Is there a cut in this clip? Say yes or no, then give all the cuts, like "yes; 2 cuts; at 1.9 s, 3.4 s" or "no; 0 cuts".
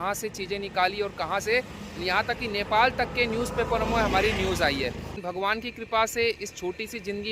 yes; 1 cut; at 5.1 s